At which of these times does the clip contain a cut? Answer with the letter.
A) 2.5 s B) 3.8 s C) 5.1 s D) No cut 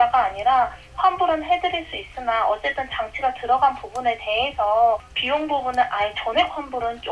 C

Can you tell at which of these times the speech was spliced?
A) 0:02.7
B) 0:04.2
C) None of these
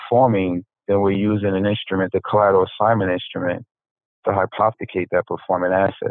C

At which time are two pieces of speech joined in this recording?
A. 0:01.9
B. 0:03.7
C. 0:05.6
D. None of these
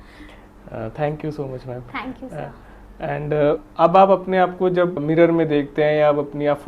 D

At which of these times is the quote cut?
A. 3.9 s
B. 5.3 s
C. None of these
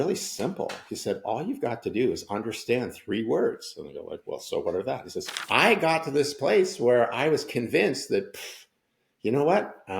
B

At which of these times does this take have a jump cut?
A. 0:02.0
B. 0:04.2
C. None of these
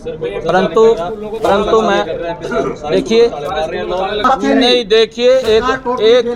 B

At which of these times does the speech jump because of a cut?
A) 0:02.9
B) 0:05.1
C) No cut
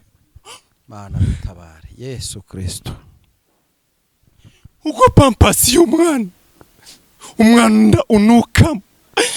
C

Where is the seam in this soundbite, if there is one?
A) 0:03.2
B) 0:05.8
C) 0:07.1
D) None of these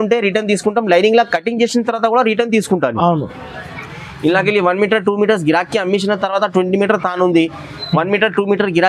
D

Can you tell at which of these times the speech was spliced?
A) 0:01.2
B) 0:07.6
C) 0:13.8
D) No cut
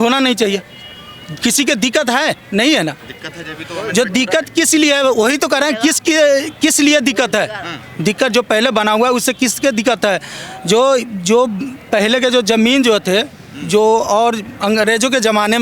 D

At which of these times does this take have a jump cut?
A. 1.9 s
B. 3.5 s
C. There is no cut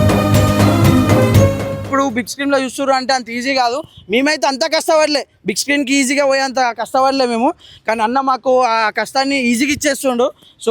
A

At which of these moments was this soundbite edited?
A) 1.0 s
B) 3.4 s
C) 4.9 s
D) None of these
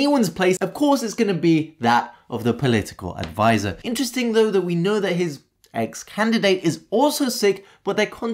D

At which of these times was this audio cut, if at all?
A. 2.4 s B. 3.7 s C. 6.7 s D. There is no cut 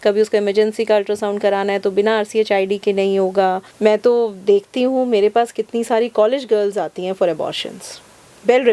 B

